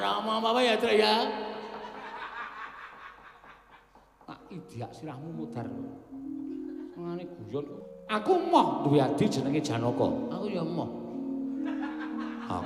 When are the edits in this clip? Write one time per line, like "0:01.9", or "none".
0:07.8